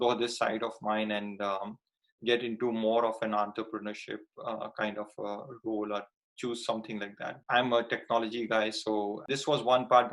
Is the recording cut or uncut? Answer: cut